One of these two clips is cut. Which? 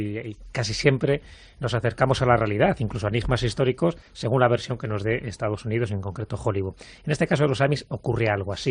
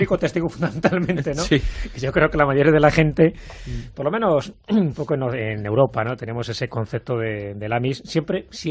first; 1 cut; at 6.9 s

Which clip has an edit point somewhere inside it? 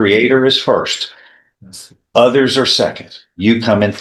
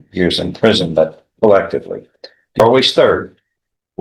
second; 1 cut; at 2.6 s

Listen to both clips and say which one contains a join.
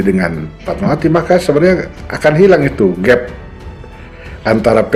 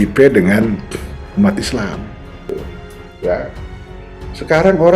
second; 1 cut; at 2.5 s

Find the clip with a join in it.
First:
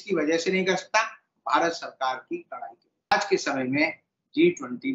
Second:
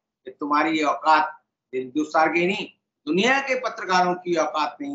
first; 1 cut; at 3.1 s

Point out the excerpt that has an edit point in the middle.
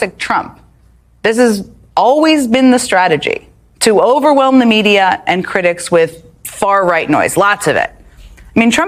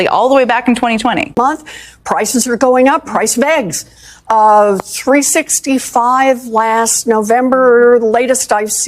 second; 1 cut; at 1.4 s

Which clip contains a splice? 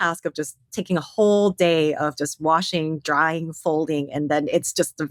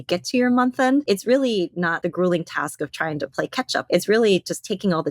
second; 3 cuts; at 1.0 s, 1.9 s, 3.9 s

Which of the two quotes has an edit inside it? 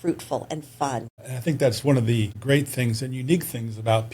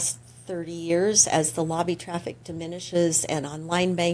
first; 2 cuts; at 1.2 s, 2.3 s

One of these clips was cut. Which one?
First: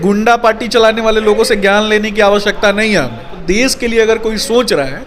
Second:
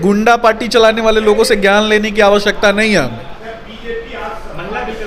first; 1 cut; at 3.4 s

